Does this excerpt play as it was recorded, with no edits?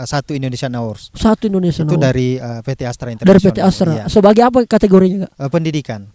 yes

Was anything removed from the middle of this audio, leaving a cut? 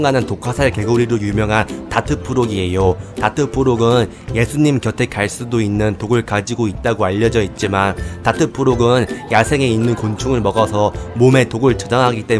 no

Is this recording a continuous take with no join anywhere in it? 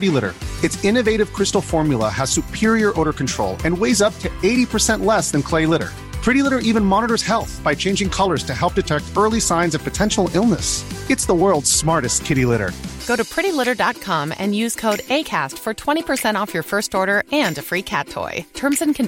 yes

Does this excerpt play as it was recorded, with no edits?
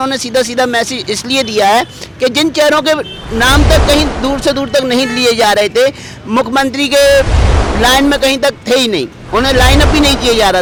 yes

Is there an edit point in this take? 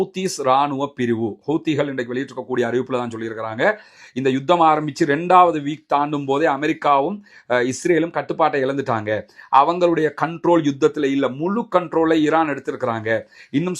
no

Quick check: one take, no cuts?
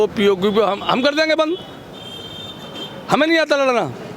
yes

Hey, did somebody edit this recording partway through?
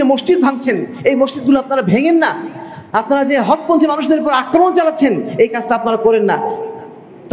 no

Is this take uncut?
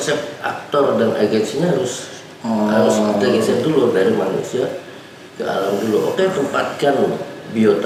yes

